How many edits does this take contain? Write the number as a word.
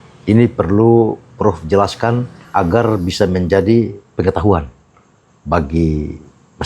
one